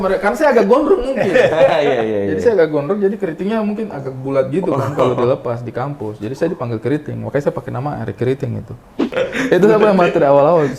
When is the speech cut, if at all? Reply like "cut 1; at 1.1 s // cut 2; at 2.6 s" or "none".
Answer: cut 1; at 9.1 s